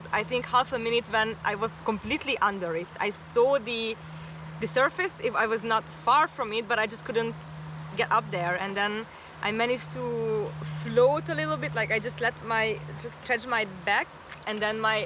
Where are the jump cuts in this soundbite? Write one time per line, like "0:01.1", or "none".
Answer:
none